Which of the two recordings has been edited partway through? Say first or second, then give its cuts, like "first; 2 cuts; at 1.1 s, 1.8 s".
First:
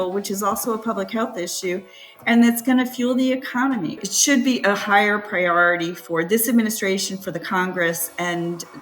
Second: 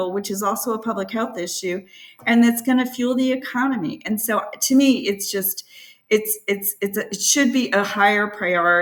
first; 1 cut; at 4.0 s